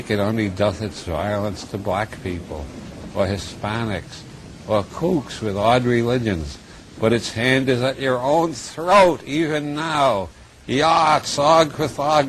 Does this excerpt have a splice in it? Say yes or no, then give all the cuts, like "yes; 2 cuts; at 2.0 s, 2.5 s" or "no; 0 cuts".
yes; 1 cut; at 5.5 s